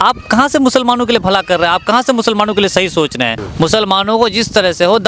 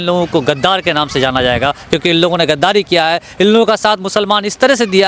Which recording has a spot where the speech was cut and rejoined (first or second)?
first